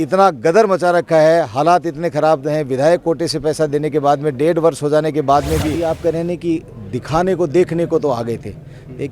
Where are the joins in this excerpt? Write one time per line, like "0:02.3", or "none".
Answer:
0:05.7